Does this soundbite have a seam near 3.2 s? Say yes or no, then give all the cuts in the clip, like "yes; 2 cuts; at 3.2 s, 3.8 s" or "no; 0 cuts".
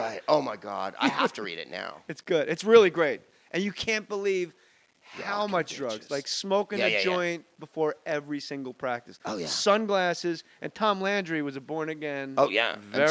yes; 1 cut; at 3.2 s